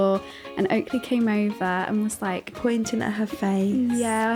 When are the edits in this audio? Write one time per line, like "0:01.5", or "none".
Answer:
none